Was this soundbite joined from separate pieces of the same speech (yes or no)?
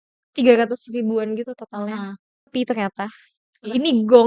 yes